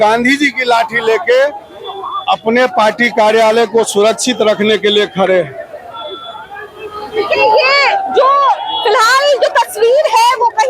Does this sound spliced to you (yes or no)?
no